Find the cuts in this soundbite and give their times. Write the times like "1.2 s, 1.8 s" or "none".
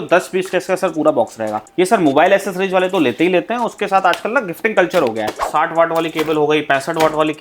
5.4 s